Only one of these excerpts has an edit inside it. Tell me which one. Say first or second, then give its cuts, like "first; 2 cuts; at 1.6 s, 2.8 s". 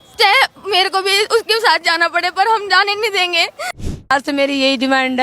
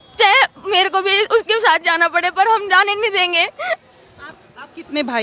first; 1 cut; at 4.1 s